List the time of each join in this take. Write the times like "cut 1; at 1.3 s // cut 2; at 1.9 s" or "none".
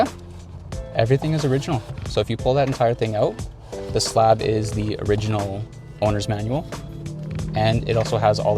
none